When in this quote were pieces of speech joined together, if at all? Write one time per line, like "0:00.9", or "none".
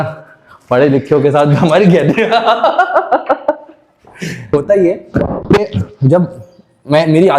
0:04.5